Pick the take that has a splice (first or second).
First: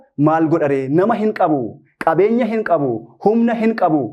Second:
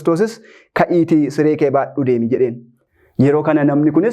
second